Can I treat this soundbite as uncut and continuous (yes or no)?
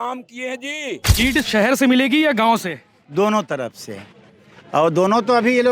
no